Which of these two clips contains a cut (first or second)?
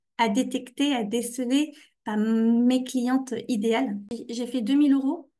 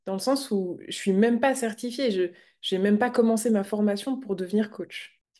first